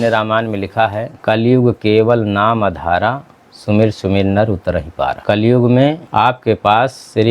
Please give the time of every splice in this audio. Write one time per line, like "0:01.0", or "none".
0:01.1
0:05.2
0:06.0

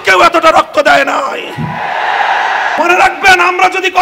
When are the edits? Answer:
0:02.8

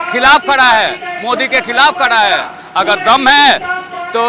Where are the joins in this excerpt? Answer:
none

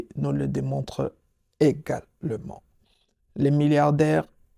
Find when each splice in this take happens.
none

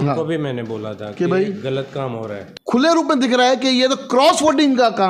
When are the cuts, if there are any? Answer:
0:02.4

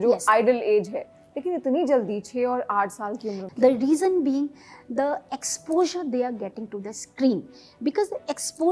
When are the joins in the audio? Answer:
0:03.5

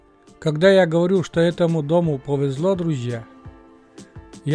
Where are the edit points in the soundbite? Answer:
none

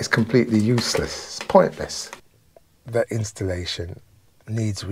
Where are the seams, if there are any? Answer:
0:02.4

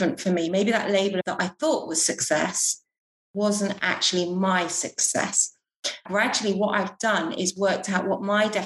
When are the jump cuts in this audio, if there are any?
0:01.3
0:06.0

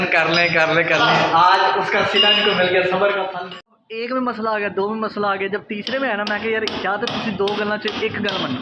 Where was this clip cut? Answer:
0:03.3

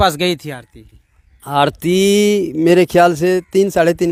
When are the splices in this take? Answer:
none

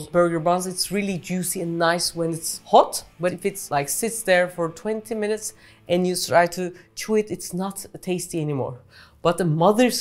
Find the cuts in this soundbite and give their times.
0:02.5
0:03.5

